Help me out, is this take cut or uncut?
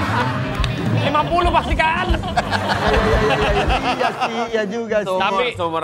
uncut